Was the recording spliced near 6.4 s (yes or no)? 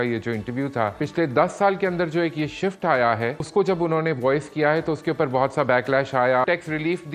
yes